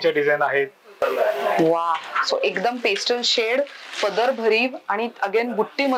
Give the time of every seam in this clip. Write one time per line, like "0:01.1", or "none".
0:01.0